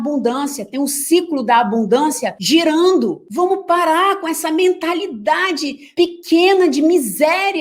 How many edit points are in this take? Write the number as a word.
zero